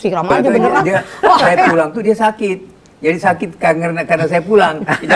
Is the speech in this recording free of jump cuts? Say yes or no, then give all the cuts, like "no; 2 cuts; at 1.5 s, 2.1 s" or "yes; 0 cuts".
no; 1 cut; at 1.7 s